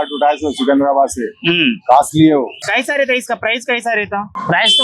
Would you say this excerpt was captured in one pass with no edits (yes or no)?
no